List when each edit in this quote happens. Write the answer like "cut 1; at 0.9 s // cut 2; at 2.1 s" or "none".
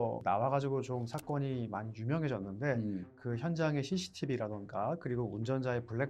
cut 1; at 3.1 s